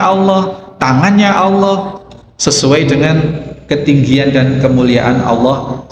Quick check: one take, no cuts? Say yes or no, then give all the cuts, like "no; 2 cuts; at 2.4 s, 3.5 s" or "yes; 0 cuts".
yes; 0 cuts